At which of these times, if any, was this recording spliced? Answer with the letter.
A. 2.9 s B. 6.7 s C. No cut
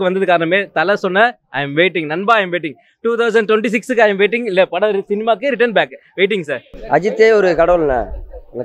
B